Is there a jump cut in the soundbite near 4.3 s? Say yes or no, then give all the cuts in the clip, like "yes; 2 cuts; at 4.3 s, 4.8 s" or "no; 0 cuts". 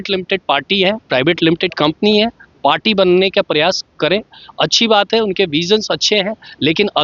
no; 0 cuts